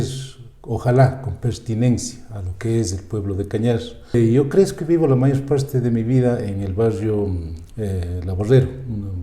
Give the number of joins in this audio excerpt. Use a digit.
1